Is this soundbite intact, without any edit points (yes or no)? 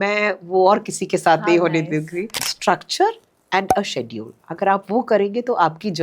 no